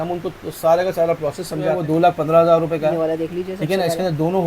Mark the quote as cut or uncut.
cut